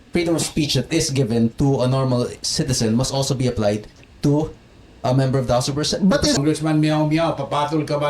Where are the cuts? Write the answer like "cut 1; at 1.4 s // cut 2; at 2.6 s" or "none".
cut 1; at 6.4 s